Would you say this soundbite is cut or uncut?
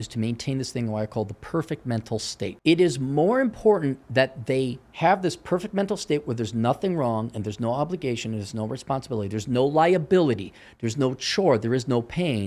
cut